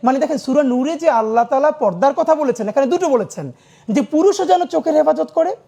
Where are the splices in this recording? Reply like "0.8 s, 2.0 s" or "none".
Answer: none

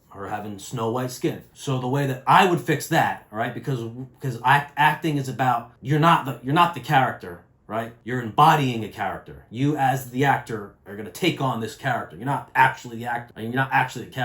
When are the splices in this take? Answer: 1.5 s, 5.7 s, 8.0 s, 13.3 s

